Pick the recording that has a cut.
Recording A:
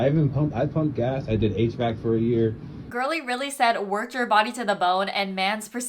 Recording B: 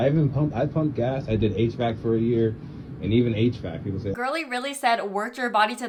A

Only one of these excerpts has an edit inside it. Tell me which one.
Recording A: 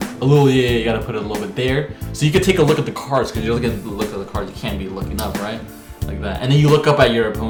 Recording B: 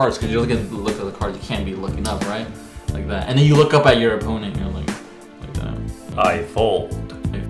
B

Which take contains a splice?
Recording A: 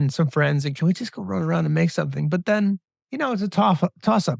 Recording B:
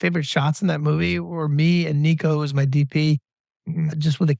A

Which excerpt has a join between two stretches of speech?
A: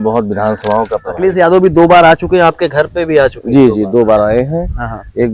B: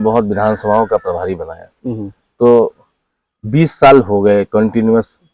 A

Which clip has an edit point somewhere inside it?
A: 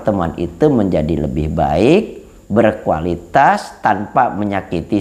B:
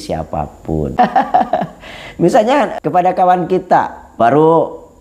B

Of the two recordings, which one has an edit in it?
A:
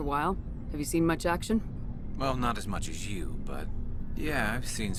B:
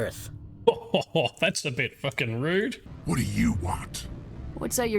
B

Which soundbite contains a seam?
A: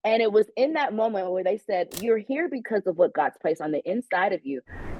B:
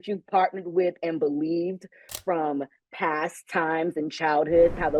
A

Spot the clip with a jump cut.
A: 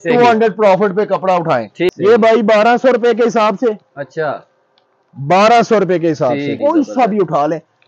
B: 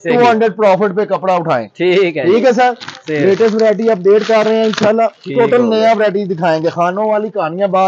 A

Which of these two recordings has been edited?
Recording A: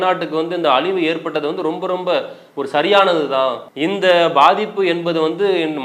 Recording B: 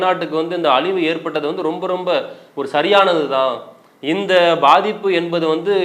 A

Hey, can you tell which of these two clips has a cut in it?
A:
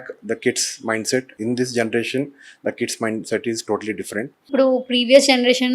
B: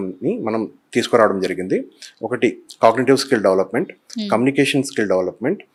A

